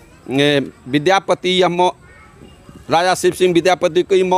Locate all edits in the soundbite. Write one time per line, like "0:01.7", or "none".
none